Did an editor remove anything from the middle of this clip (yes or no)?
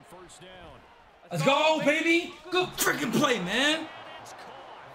no